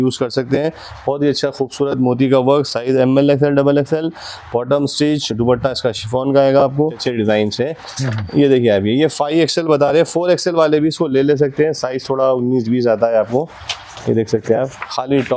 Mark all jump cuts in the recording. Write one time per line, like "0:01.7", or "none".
0:07.0